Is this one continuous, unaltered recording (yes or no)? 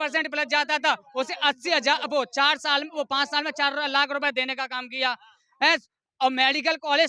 yes